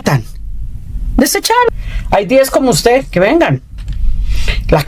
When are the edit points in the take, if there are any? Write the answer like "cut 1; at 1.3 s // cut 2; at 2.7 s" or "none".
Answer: cut 1; at 1.7 s